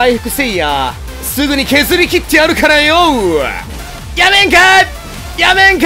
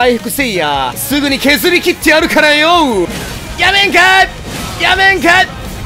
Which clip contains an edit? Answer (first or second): second